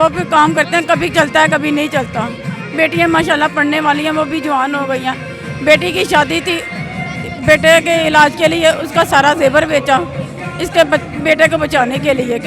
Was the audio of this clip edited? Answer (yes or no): no